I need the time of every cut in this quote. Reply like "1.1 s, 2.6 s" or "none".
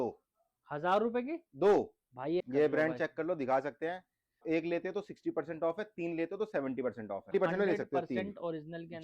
2.4 s, 4.4 s, 7.3 s